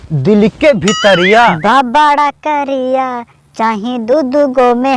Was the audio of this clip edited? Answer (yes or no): yes